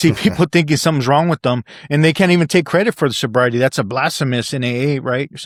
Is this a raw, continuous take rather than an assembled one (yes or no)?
yes